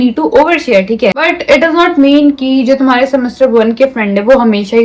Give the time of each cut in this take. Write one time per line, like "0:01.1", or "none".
0:01.2